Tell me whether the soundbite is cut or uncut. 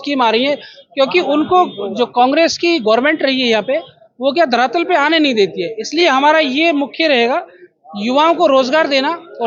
uncut